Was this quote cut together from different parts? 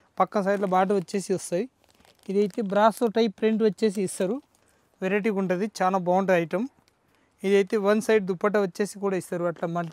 no; 0 cuts

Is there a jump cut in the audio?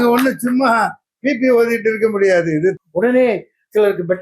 yes; 1 cut; at 2.8 s

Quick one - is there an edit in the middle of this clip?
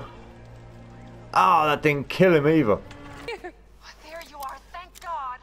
yes; 1 cut; at 3.3 s

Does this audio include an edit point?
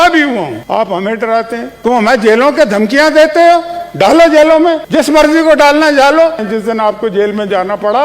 yes; 2 cuts; at 1.8 s, 6.4 s

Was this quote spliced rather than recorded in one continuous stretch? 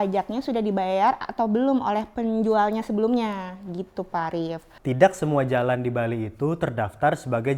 yes; 1 cut; at 4.7 s

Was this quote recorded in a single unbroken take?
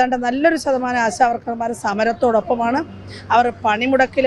yes; 0 cuts

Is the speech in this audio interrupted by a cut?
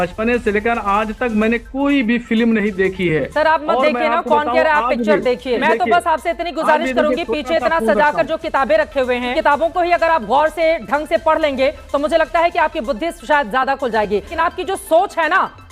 yes; 3 cuts; at 5.6 s, 9.3 s, 14.3 s

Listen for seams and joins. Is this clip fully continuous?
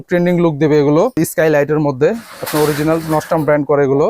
no; 1 cut; at 1.2 s

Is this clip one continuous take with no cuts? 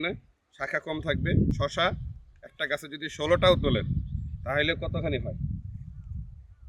no; 1 cut; at 1.5 s

